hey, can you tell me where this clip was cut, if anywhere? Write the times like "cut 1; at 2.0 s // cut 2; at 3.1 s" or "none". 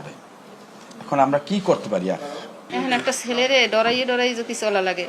cut 1; at 2.6 s